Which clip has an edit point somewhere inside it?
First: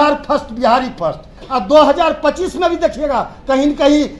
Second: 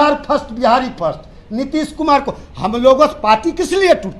first; 1 cut; at 1.4 s

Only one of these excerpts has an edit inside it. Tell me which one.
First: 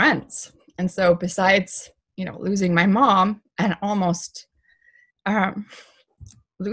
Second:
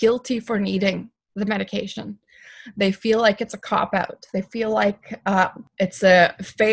second; 1 cut; at 5.6 s

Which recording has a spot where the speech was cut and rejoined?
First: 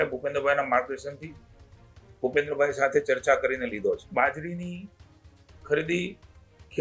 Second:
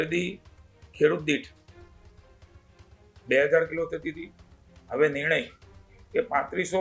first; 1 cut; at 4.1 s

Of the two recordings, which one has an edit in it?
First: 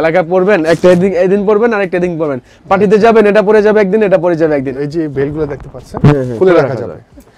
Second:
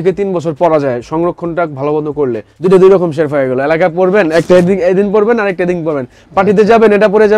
second; 1 cut; at 2.5 s

